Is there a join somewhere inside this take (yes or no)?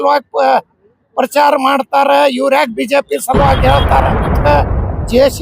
yes